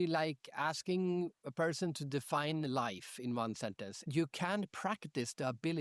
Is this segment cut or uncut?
cut